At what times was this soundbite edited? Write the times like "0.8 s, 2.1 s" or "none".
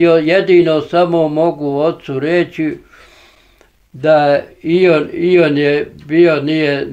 none